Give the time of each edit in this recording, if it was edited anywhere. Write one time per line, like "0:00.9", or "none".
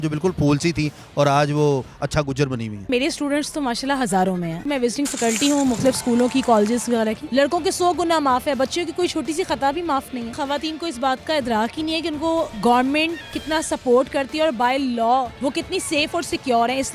0:02.9
0:04.6
0:07.2
0:10.3
0:12.5
0:15.3